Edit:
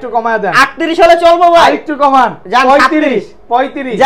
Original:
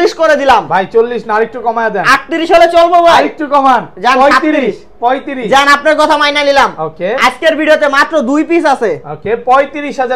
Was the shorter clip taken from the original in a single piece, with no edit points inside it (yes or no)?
yes